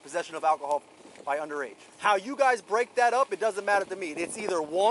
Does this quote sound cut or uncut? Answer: cut